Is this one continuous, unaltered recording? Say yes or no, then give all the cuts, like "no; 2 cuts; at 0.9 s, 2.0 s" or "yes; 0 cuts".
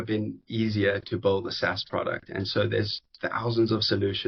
yes; 0 cuts